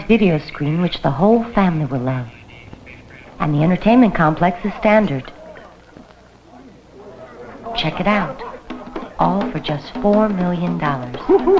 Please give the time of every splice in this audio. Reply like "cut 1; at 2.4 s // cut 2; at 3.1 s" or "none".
cut 1; at 6.0 s